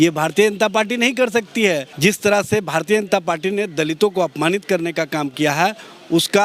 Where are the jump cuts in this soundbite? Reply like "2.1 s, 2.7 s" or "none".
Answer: 1.9 s